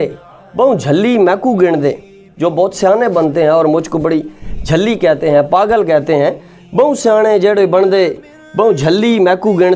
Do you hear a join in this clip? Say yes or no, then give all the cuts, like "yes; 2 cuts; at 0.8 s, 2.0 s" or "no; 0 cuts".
no; 0 cuts